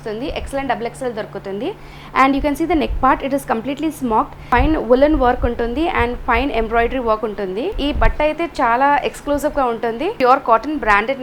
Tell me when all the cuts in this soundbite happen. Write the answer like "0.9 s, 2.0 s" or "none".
4.4 s, 7.8 s, 10.2 s